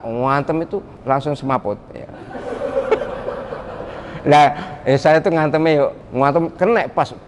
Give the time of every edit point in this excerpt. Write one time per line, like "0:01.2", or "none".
0:00.9
0:06.0